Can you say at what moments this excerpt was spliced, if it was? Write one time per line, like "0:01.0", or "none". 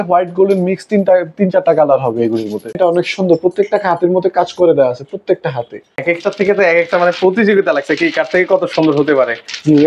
0:02.8
0:06.0